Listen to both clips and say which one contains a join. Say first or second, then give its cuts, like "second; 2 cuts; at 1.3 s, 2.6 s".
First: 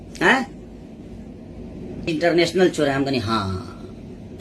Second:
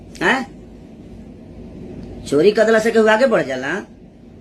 first; 1 cut; at 2.1 s